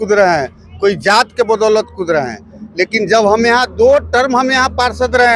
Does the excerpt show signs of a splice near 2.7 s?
no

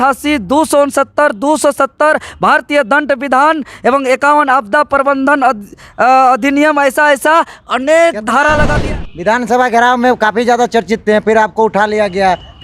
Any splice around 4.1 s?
no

